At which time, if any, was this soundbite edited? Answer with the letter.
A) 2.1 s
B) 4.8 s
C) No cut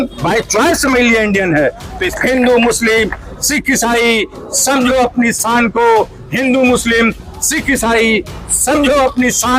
A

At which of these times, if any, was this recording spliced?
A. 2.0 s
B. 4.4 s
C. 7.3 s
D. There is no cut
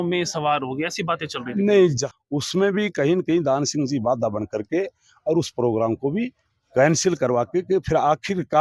A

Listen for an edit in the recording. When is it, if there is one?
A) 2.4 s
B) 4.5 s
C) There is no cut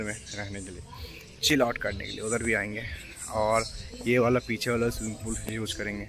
C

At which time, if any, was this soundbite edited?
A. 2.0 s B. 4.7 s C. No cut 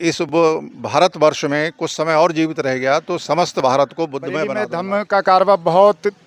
B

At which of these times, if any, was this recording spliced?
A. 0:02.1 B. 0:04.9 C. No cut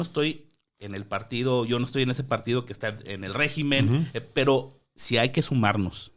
C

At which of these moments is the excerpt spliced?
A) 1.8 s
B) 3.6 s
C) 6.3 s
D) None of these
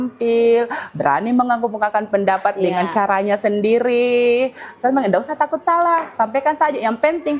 D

